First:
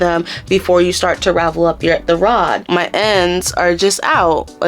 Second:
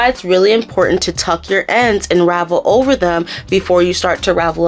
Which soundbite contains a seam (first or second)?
first